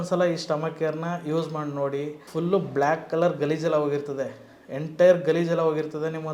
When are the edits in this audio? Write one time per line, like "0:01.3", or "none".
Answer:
0:02.2